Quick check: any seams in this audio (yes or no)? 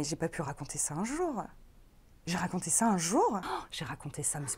yes